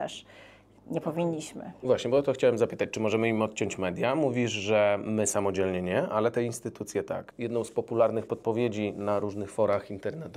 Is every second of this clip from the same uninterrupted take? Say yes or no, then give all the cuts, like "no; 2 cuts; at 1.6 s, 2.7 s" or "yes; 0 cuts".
no; 1 cut; at 7.3 s